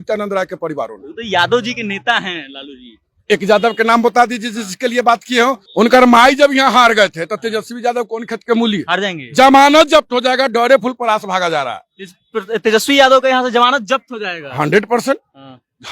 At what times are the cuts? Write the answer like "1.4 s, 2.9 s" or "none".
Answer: 5.6 s